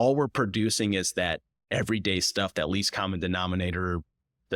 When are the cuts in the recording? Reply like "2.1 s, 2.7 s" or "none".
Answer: 1.5 s